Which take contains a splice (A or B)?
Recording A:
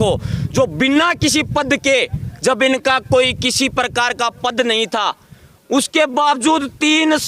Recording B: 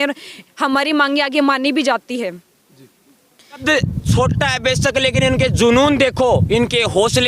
B